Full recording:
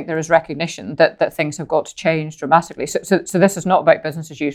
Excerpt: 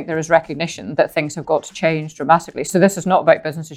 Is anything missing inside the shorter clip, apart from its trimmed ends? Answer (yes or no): yes